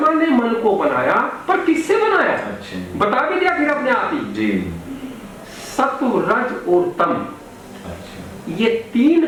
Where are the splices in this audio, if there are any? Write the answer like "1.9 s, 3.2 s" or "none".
none